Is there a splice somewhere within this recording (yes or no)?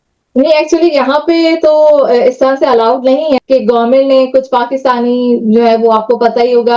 yes